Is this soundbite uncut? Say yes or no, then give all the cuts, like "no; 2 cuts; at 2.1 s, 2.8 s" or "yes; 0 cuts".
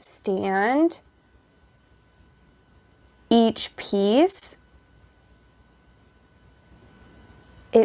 yes; 0 cuts